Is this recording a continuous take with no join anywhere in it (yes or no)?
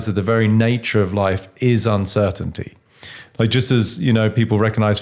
yes